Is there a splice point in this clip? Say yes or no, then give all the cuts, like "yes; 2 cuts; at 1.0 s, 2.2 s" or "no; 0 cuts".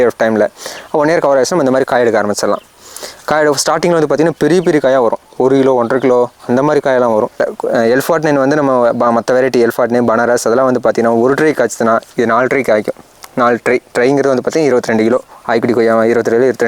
yes; 1 cut; at 7.3 s